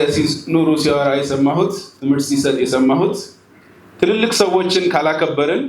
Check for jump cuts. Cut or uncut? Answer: uncut